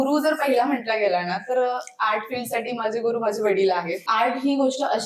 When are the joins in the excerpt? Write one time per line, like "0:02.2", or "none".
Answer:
0:04.0